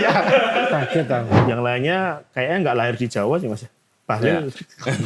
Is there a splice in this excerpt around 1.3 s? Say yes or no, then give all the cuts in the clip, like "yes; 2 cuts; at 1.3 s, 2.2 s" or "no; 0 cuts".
yes; 1 cut; at 1.3 s